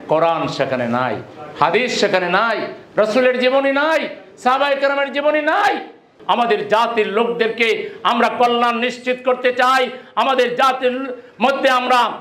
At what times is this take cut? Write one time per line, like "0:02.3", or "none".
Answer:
0:06.1

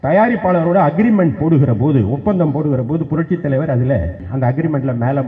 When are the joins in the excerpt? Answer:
0:04.2

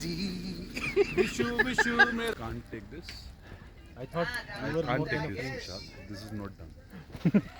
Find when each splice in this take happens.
0:02.5

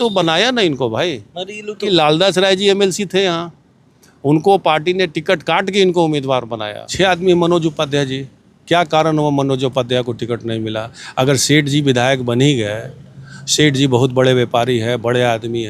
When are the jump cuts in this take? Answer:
0:01.8
0:06.8

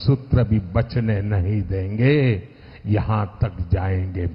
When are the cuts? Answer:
none

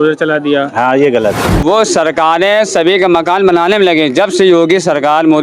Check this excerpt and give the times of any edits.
0:01.6

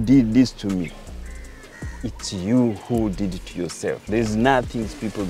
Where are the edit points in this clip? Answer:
none

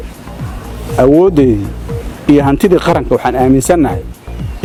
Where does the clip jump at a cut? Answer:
none

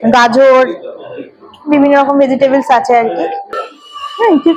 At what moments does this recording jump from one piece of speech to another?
0:03.5

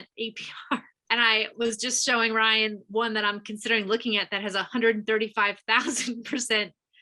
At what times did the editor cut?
0:00.9

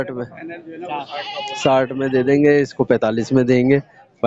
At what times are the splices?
none

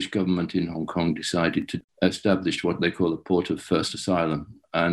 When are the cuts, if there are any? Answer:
0:01.7

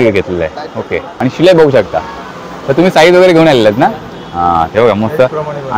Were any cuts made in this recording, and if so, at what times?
0:01.0

